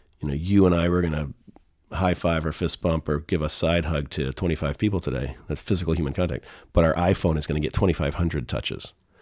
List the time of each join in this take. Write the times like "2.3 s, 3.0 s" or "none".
none